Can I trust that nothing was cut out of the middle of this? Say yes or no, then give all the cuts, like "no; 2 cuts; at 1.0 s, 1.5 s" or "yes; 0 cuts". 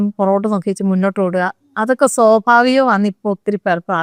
yes; 0 cuts